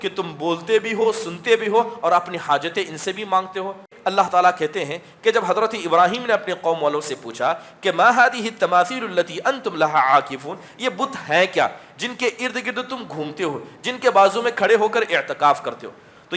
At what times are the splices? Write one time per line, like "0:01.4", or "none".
0:03.9

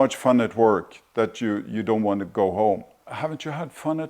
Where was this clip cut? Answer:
0:02.9

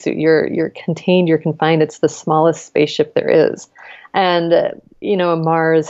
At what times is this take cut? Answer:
0:05.0

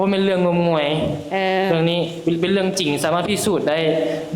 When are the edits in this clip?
none

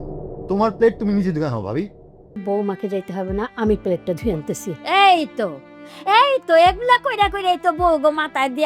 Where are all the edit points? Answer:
0:02.3

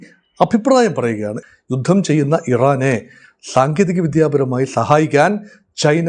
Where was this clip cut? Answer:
0:01.4

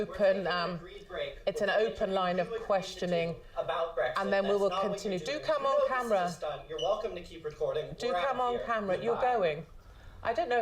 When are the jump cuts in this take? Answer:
0:08.6

